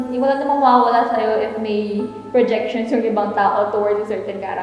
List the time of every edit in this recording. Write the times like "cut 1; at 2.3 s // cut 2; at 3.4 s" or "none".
none